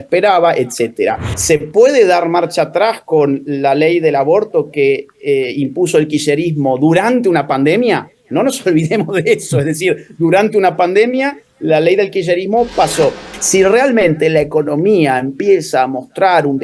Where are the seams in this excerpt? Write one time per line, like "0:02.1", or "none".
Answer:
0:01.3
0:13.3